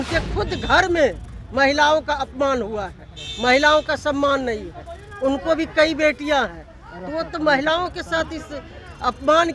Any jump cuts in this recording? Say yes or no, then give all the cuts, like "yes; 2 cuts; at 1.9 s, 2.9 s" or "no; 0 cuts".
no; 0 cuts